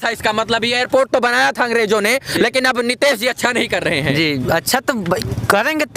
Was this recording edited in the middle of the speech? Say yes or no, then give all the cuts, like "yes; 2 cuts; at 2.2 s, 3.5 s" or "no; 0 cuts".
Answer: no; 0 cuts